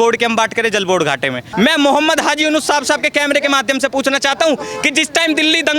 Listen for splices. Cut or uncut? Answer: cut